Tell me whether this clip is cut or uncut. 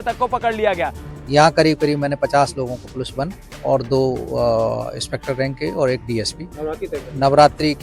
cut